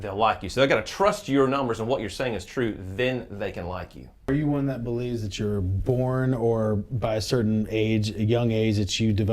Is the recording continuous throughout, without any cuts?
no; 1 cut; at 4.3 s

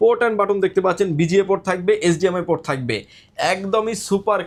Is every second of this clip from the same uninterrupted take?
yes; 0 cuts

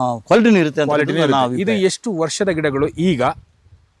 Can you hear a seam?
no; 0 cuts

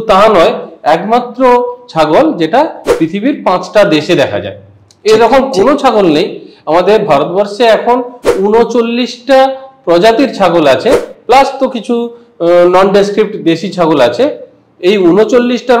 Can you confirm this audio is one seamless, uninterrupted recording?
yes; 0 cuts

